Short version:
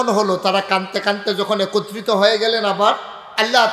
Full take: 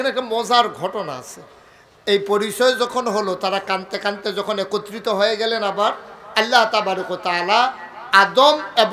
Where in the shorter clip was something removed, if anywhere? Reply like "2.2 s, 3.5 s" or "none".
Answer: none